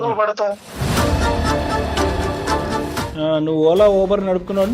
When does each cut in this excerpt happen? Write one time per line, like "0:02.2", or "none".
none